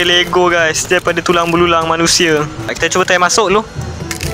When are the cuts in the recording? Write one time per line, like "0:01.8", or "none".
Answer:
0:02.7